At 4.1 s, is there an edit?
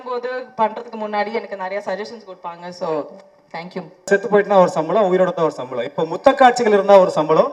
yes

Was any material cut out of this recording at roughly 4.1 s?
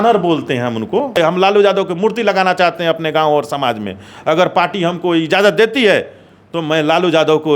no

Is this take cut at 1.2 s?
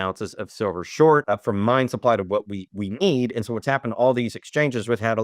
yes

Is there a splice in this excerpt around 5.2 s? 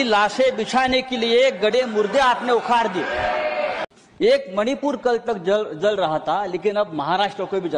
no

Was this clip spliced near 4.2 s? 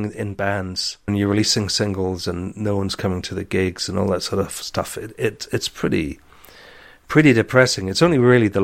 no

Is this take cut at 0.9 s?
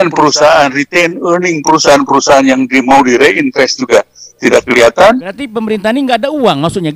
no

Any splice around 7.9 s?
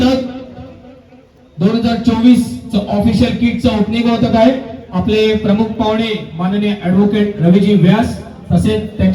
no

